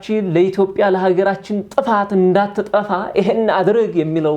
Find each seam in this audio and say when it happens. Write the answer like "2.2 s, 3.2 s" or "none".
none